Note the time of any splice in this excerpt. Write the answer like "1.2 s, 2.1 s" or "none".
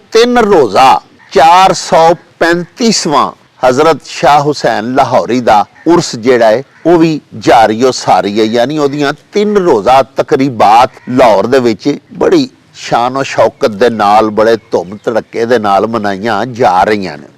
1.2 s, 3.4 s, 5.7 s, 6.7 s, 11.0 s, 12.1 s